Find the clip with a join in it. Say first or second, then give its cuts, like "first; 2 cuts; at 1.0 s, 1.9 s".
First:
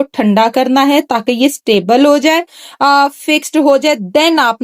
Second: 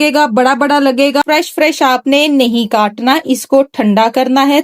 second; 1 cut; at 1.2 s